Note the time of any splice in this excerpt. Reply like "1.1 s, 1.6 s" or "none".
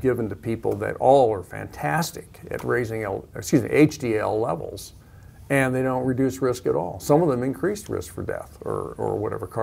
none